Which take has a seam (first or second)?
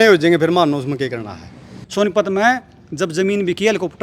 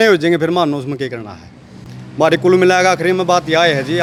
first